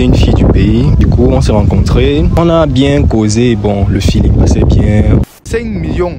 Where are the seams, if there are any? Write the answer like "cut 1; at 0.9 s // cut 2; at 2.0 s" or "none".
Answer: cut 1; at 1.0 s // cut 2; at 2.3 s // cut 3; at 5.2 s